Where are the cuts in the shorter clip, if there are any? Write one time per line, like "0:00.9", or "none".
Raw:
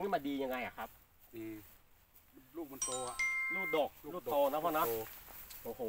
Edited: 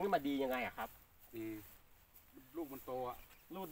none